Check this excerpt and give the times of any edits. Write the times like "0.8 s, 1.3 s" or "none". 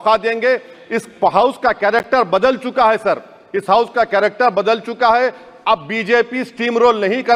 none